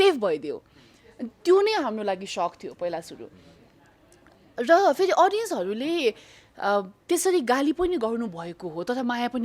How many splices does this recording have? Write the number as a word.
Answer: zero